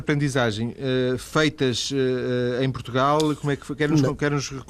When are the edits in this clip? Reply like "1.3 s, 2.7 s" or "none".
1.6 s